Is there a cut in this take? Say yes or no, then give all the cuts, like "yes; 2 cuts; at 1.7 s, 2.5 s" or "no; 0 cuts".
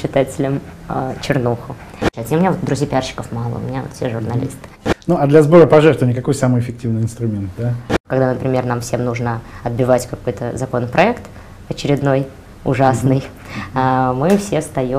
yes; 3 cuts; at 2.1 s, 4.6 s, 8.0 s